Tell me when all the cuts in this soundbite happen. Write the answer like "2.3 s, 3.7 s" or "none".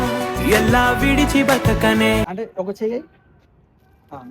2.2 s